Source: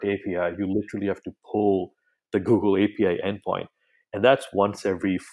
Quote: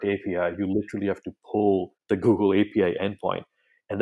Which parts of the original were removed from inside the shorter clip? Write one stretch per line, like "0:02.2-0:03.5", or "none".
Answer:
0:01.9-0:02.2